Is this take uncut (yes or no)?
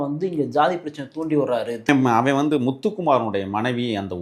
no